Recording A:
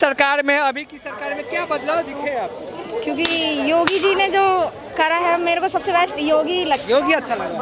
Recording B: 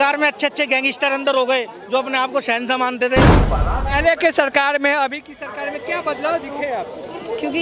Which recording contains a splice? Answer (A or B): B